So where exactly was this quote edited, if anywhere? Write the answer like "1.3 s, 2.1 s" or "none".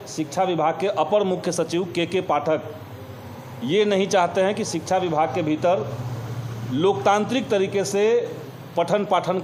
none